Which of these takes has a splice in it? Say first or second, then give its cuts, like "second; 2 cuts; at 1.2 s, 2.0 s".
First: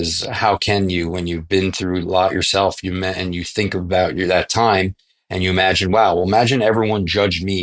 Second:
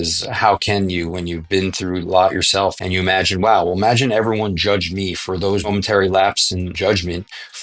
second; 3 cuts; at 2.8 s, 5.7 s, 6.7 s